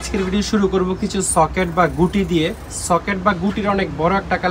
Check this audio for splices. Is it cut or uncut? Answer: uncut